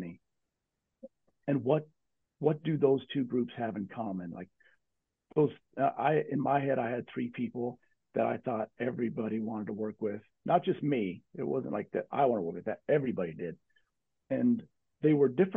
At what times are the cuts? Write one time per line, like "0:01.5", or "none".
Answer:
none